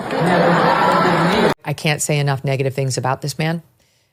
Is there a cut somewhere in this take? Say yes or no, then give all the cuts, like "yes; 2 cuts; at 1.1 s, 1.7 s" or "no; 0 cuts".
yes; 1 cut; at 1.5 s